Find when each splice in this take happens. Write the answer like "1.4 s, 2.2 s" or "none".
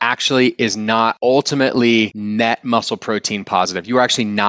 1.2 s, 2.2 s